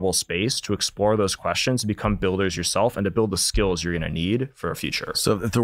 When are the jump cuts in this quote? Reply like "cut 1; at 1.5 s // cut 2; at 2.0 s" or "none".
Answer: none